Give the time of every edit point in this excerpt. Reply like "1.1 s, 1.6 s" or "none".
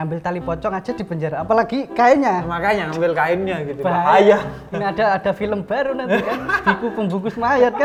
none